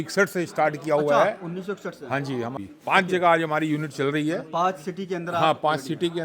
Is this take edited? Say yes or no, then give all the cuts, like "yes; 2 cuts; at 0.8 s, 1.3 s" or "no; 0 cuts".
yes; 1 cut; at 2.5 s